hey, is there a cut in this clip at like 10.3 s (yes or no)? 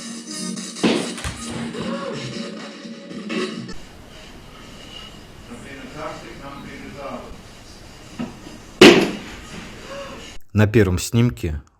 yes